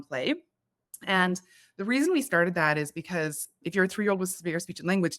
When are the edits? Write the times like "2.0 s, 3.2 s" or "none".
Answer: 3.5 s